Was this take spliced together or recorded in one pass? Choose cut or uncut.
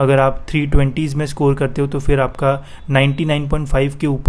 uncut